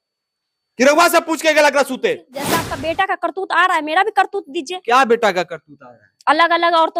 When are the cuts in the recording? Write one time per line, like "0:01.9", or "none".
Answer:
0:02.7